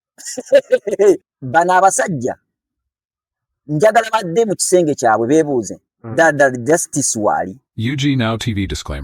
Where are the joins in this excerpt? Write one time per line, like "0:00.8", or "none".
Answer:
0:01.2
0:07.6